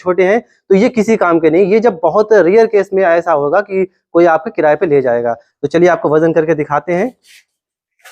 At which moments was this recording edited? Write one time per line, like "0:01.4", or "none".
0:05.5